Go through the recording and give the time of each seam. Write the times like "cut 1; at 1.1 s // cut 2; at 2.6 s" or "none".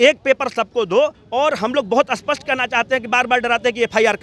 cut 1; at 1.2 s